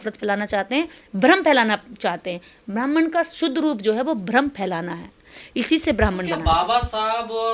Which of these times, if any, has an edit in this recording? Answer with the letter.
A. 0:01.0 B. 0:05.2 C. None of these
C